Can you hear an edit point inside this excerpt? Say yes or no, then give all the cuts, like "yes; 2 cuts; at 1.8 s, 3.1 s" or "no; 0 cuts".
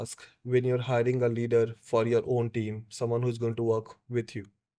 no; 0 cuts